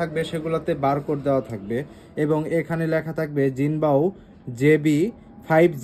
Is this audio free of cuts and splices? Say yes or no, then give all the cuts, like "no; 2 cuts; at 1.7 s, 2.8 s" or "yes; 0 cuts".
yes; 0 cuts